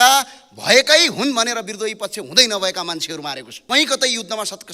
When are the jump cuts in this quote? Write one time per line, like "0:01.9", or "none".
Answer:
0:03.6